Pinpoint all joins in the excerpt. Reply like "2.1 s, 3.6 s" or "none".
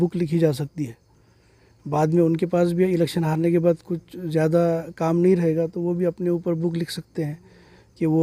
none